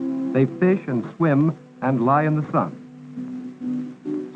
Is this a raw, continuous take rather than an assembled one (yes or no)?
yes